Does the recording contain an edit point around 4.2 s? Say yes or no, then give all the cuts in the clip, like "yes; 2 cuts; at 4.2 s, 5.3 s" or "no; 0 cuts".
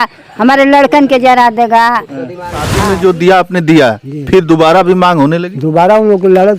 no; 1 cut; at 2.8 s